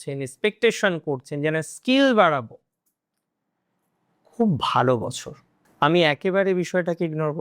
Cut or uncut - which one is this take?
cut